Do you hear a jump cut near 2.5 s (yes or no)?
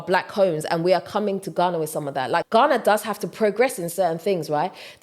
yes